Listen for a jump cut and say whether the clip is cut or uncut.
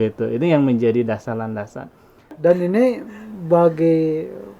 cut